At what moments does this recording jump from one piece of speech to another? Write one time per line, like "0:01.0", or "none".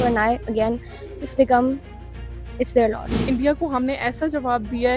0:03.2

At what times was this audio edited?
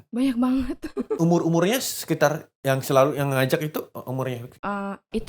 0:01.1
0:04.5

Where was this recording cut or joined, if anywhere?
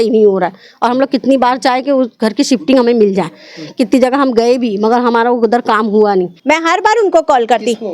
0:06.3

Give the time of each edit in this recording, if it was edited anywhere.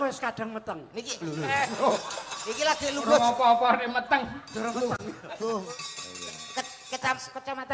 0:05.7

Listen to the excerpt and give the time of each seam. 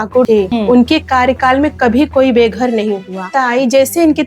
0:03.3

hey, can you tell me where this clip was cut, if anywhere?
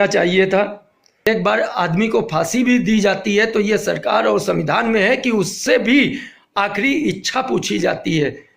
0:01.3

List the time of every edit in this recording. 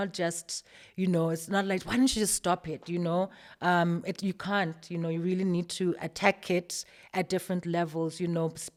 none

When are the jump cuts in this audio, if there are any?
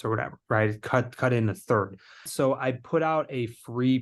0:02.3

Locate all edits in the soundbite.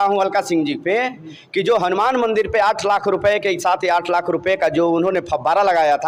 none

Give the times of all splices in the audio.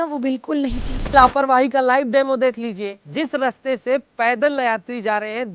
0:01.0

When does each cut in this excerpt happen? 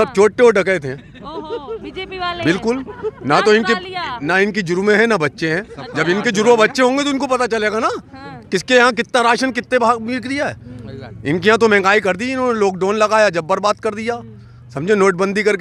none

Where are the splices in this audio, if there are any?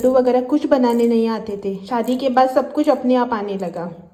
none

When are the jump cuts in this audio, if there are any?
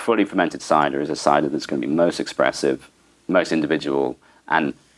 none

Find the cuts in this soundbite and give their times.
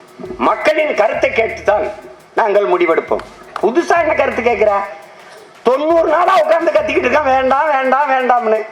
none

